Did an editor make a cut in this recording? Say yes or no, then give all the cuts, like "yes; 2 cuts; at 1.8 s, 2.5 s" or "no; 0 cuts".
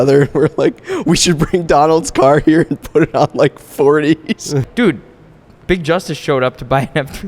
yes; 1 cut; at 4.6 s